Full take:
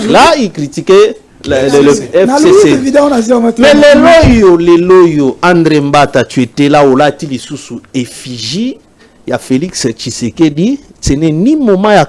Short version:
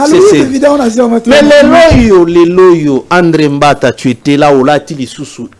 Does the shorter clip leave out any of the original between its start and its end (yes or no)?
no